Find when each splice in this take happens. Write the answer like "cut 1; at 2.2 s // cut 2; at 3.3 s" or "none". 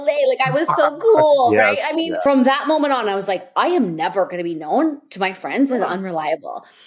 cut 1; at 2.2 s

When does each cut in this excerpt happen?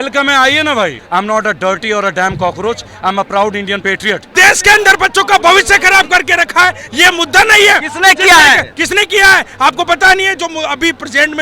cut 1; at 0.9 s // cut 2; at 4.3 s

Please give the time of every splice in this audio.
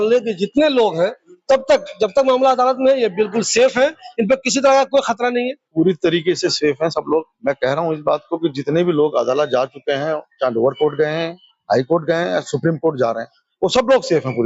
none

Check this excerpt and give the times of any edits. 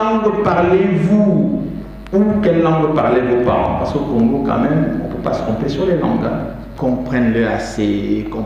cut 1; at 6.6 s

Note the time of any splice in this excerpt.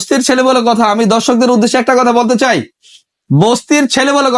none

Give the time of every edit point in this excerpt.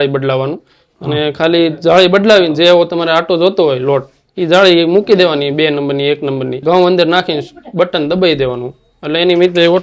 cut 1; at 6.6 s

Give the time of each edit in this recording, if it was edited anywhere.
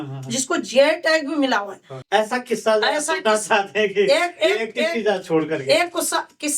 cut 1; at 1.9 s

